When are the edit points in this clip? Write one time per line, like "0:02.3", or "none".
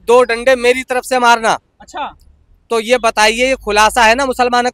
none